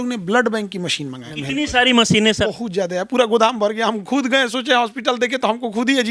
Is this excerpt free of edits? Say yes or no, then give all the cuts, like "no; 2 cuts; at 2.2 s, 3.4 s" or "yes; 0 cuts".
no; 2 cuts; at 1.3 s, 2.5 s